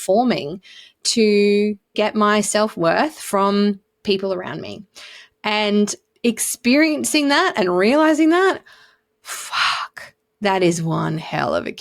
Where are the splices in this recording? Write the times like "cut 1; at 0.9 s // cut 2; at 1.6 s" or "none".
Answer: cut 1; at 1.9 s